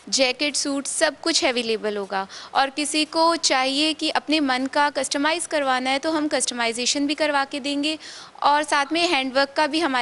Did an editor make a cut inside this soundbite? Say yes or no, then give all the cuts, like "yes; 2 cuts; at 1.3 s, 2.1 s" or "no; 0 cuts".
no; 0 cuts